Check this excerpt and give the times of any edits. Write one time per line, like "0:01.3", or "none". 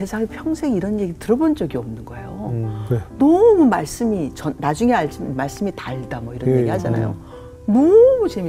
none

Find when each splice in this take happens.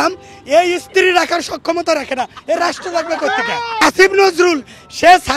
0:03.8

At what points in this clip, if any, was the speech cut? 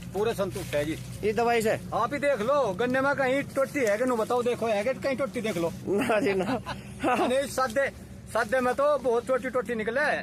none

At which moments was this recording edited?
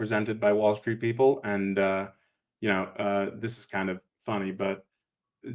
none

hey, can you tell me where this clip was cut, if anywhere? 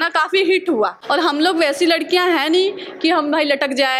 0:01.0

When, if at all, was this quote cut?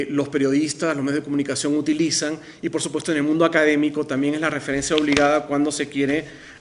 0:04.1

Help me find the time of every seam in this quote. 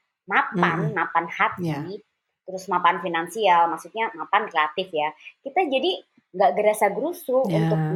none

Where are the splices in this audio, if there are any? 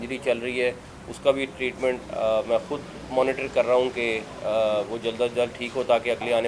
none

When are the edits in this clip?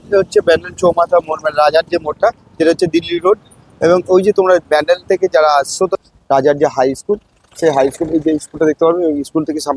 0:05.9

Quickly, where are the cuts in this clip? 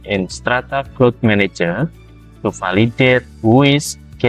none

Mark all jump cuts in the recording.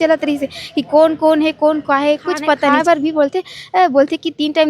0:02.8

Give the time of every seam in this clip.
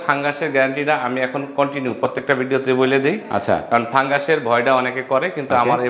none

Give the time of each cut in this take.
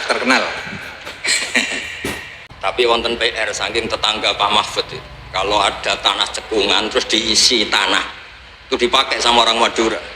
0:02.3

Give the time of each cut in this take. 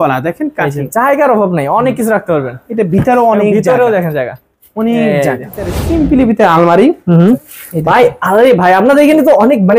0:05.8
0:07.4

